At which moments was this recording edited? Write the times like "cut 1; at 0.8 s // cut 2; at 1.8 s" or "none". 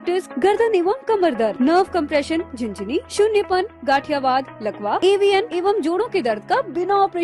none